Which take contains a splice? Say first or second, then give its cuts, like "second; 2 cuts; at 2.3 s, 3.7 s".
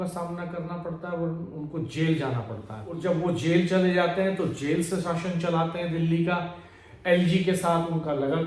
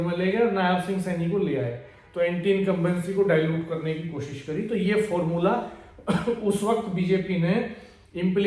first; 1 cut; at 2.8 s